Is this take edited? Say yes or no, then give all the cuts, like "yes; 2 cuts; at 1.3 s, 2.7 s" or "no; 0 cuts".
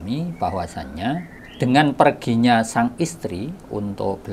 yes; 1 cut; at 1.4 s